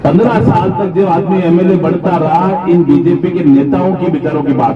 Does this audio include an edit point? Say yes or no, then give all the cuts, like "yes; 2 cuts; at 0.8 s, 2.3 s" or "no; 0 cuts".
no; 0 cuts